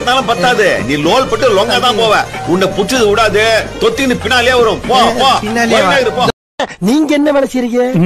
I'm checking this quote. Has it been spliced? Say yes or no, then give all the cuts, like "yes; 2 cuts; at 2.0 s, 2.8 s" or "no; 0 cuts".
yes; 1 cut; at 6.5 s